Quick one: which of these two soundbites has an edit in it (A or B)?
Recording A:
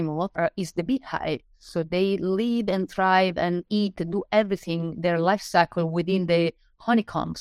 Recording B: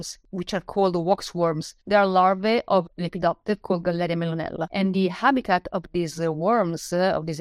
B